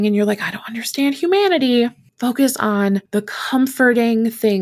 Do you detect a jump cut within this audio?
yes; 2 cuts; at 2.0 s, 3.1 s

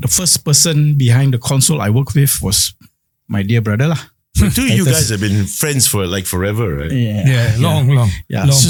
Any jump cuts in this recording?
no; 0 cuts

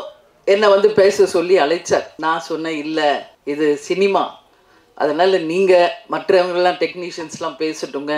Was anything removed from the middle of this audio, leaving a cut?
yes; 2 cuts; at 2.1 s, 3.3 s

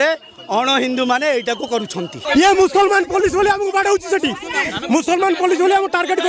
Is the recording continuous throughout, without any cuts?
no; 1 cut; at 2.1 s

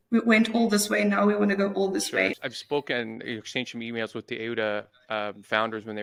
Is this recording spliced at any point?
no; 0 cuts

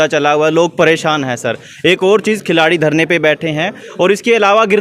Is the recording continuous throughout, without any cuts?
yes; 0 cuts

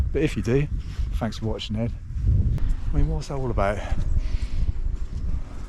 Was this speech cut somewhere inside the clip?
yes; 1 cut; at 2.6 s

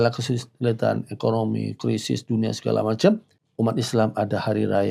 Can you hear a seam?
yes; 1 cut; at 3.4 s

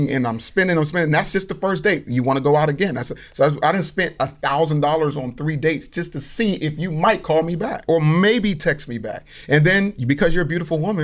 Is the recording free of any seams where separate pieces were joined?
no; 2 cuts; at 7.8 s, 10.0 s

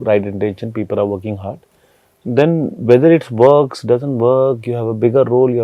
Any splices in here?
no; 0 cuts

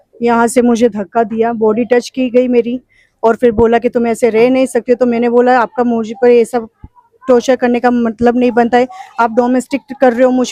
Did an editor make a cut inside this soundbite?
no; 0 cuts

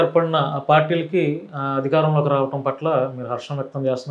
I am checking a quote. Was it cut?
no; 0 cuts

